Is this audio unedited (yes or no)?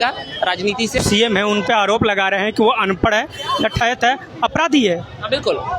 no